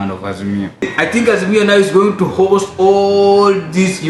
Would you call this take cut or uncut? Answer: cut